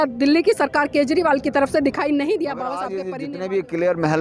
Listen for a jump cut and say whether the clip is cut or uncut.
cut